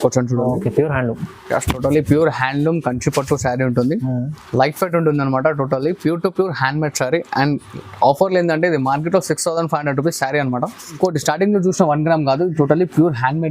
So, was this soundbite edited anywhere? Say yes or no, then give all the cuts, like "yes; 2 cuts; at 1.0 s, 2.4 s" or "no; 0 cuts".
yes; 1 cut; at 10.9 s